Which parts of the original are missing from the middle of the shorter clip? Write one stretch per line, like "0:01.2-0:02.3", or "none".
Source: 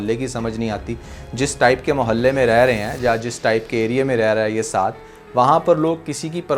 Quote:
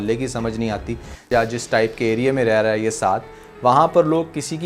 0:01.2-0:02.9